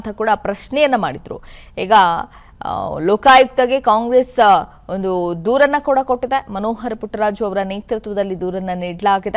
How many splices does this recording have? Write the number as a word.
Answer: one